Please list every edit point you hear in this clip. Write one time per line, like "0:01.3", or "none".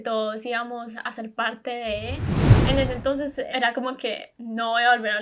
0:02.4